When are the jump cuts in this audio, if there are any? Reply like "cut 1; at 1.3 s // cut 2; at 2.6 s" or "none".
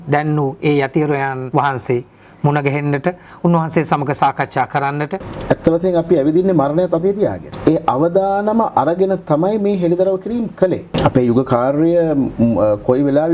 cut 1; at 1.4 s // cut 2; at 5.3 s // cut 3; at 7.5 s // cut 4; at 10.9 s